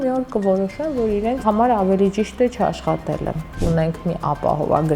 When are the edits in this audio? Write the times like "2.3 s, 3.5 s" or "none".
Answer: 1.4 s, 3.5 s